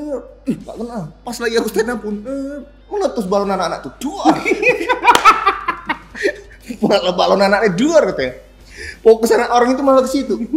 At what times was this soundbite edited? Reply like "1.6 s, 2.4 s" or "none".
none